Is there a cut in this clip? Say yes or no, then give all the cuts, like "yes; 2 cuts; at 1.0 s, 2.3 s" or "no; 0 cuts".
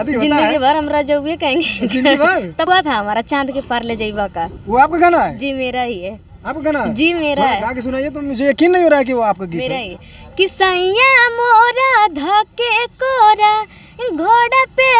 yes; 1 cut; at 2.7 s